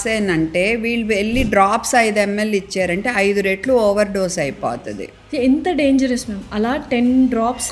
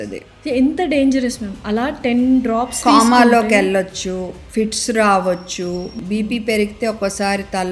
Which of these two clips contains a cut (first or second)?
second